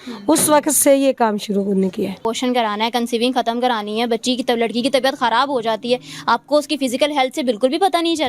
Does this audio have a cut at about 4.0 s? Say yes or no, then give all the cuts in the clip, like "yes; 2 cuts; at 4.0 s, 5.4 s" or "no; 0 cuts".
no; 1 cut; at 2.2 s